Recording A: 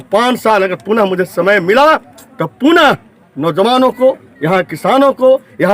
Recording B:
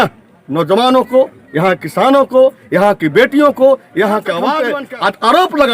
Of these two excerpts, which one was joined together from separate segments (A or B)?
B